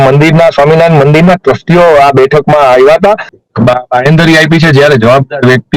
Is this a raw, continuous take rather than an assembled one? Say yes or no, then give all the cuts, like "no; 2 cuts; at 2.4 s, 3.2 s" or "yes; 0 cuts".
no; 1 cut; at 3.3 s